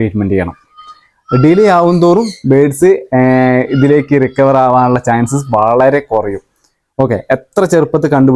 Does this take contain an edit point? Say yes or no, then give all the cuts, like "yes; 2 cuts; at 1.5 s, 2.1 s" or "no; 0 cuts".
no; 0 cuts